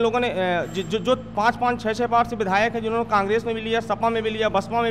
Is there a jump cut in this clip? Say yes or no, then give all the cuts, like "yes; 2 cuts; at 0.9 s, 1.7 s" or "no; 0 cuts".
no; 0 cuts